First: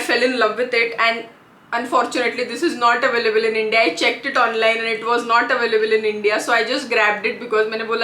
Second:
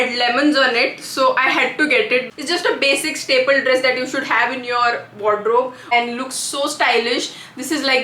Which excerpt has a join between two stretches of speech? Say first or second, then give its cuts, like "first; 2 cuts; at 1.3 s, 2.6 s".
second; 2 cuts; at 2.3 s, 5.8 s